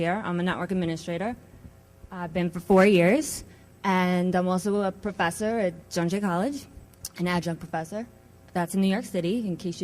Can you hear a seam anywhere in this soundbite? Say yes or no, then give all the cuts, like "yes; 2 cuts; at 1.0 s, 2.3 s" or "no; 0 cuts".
yes; 1 cut; at 4.3 s